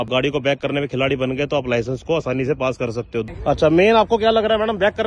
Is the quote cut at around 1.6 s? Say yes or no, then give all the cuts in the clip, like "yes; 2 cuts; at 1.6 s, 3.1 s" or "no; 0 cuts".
no; 1 cut; at 3.3 s